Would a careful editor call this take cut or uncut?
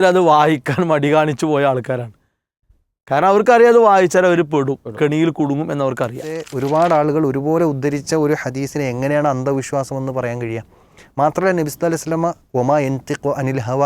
cut